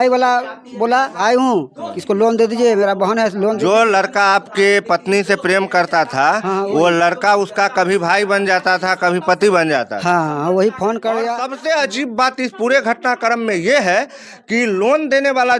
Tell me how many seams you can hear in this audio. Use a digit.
1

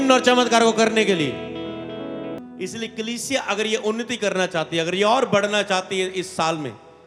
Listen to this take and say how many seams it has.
1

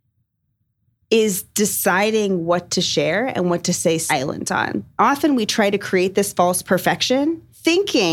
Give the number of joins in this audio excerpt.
2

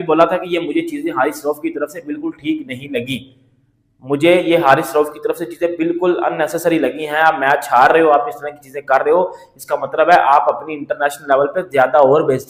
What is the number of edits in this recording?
0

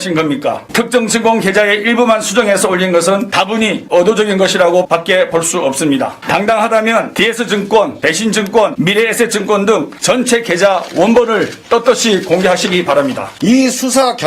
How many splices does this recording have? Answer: 2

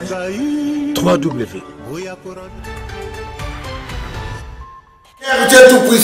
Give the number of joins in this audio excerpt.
0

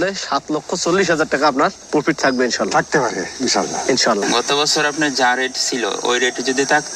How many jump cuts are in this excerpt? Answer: 1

